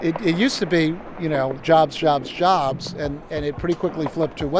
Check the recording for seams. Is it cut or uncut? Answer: cut